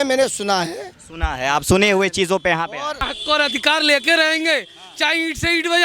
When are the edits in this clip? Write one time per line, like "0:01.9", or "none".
0:03.0